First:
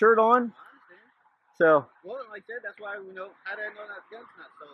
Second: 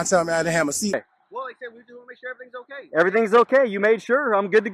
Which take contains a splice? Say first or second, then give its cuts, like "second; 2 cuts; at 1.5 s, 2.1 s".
second; 1 cut; at 1.0 s